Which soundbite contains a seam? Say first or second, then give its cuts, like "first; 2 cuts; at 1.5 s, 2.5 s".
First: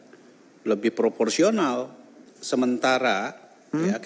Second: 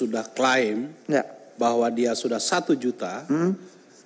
first; 1 cut; at 2.3 s